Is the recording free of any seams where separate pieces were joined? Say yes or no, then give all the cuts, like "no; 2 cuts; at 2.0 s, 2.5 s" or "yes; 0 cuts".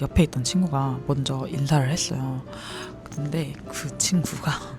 yes; 0 cuts